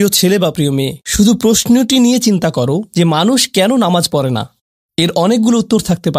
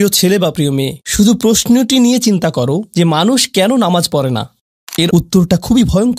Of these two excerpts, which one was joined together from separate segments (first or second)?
second